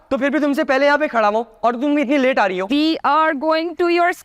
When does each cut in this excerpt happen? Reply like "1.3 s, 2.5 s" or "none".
2.6 s